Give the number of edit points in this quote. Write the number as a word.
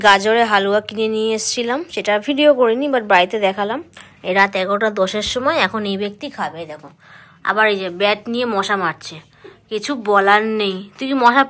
zero